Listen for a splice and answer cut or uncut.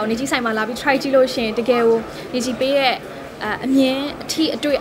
uncut